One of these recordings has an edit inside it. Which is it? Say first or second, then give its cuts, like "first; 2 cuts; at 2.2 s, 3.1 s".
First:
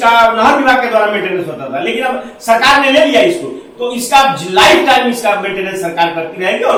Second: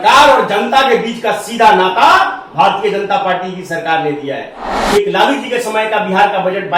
second; 1 cut; at 4.6 s